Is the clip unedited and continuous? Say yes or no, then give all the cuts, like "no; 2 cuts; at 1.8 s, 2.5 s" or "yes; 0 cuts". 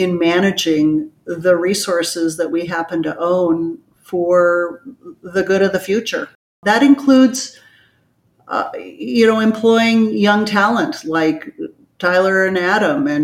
no; 1 cut; at 6.5 s